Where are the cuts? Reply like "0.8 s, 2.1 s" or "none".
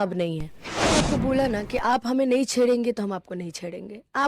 0.9 s

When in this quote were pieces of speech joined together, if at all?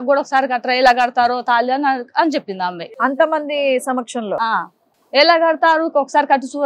2.8 s

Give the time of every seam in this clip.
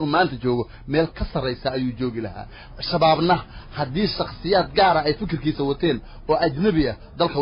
none

